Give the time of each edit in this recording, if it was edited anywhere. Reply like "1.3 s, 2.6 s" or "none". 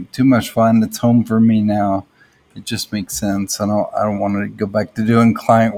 none